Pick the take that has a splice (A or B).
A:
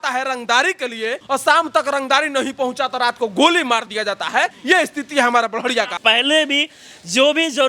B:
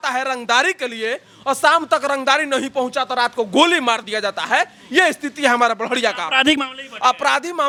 A